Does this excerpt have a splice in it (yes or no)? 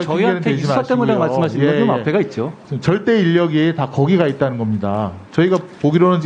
no